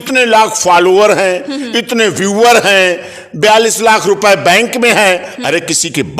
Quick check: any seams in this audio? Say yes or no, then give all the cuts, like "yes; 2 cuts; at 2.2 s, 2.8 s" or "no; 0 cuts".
no; 0 cuts